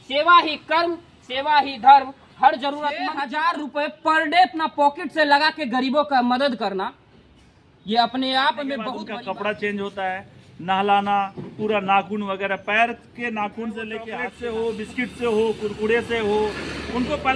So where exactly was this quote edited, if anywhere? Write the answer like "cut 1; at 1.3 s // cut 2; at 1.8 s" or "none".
cut 1; at 3.2 s // cut 2; at 8.9 s // cut 3; at 14.2 s